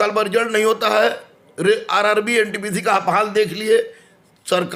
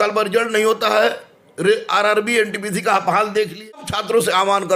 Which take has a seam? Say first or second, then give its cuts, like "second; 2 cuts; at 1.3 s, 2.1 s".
second; 1 cut; at 3.7 s